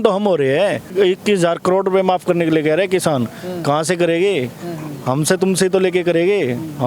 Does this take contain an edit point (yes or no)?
yes